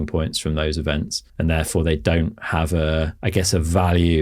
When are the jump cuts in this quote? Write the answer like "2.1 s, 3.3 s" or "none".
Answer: 1.2 s, 3.2 s